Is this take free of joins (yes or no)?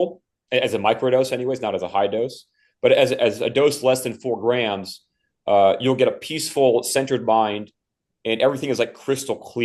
yes